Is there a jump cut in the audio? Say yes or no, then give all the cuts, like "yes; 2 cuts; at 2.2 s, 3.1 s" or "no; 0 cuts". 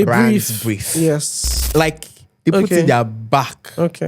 yes; 1 cut; at 1.6 s